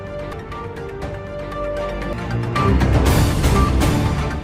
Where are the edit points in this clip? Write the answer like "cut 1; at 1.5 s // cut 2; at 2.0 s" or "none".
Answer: none